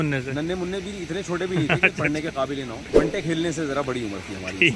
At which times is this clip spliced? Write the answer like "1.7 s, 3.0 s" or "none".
2.9 s

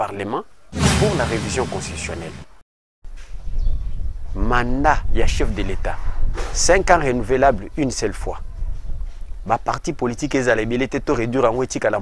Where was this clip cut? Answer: 2.8 s

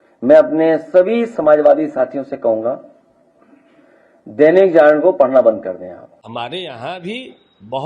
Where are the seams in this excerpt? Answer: 6.1 s

